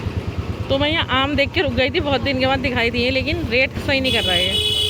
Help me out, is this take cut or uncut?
uncut